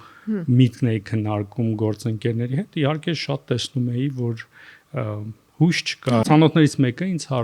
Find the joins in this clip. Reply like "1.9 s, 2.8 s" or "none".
6.2 s